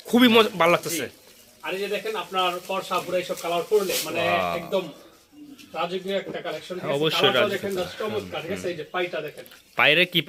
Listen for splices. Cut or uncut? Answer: uncut